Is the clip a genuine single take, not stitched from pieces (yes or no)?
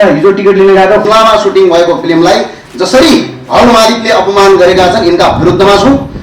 no